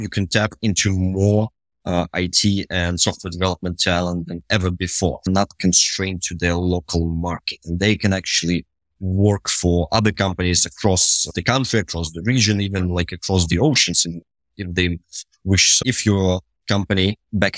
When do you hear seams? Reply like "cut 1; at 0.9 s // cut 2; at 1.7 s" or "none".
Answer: cut 1; at 5.3 s // cut 2; at 11.3 s // cut 3; at 15.7 s